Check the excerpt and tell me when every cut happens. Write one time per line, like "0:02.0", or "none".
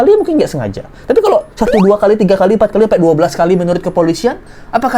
none

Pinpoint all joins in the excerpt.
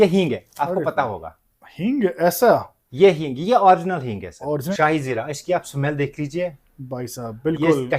0:04.7

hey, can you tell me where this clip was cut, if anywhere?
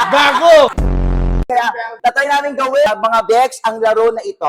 0:01.0

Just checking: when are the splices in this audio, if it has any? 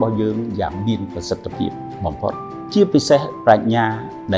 0:02.7

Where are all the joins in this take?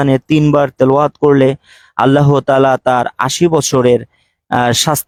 none

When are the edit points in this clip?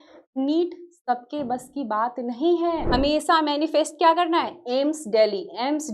0:02.8

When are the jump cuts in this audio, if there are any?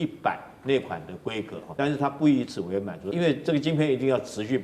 0:01.6
0:03.1

